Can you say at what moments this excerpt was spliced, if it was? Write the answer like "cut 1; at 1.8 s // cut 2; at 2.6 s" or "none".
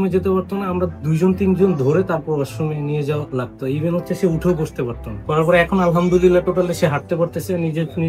cut 1; at 5.2 s